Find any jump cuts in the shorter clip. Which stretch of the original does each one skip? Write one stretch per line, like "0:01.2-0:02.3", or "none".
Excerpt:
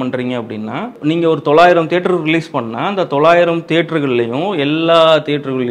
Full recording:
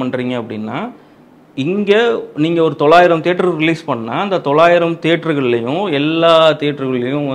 0:00.9-0:02.3